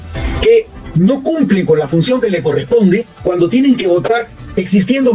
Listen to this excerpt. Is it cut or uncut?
uncut